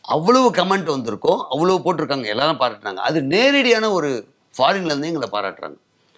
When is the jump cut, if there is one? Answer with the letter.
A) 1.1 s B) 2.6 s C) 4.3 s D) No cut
D